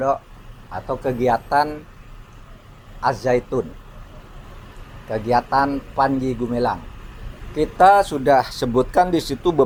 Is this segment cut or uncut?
uncut